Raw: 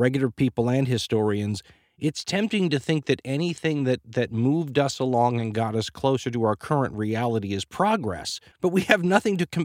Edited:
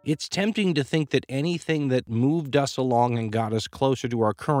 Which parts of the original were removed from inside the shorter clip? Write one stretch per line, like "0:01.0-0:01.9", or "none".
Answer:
0:04.1-0:04.3